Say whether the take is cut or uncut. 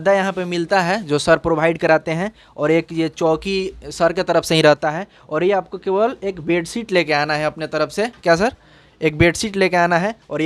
uncut